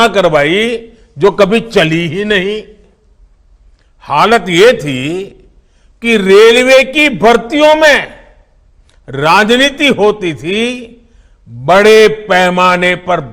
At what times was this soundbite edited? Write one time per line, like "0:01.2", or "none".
none